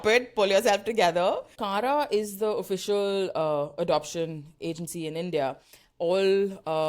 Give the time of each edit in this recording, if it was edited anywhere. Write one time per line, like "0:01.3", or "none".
0:01.6